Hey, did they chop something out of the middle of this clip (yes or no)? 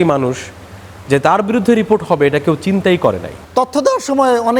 yes